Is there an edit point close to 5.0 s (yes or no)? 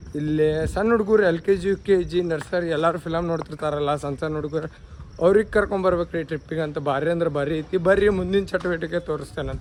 no